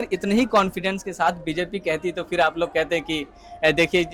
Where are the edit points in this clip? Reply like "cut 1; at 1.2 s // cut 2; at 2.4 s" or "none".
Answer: none